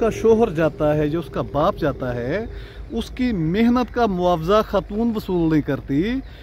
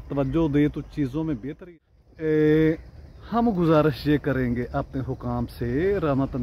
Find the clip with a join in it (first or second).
second